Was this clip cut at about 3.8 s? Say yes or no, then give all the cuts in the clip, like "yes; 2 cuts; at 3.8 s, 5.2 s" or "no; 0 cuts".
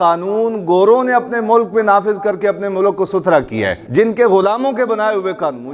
yes; 1 cut; at 3.8 s